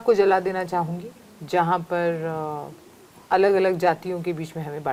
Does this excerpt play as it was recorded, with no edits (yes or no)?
yes